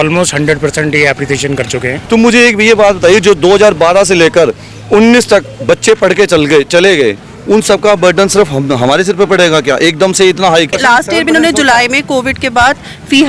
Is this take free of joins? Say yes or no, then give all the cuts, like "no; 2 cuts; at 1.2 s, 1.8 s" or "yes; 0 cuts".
no; 2 cuts; at 1.9 s, 10.7 s